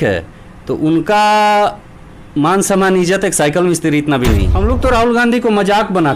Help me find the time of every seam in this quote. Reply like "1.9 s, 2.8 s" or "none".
4.5 s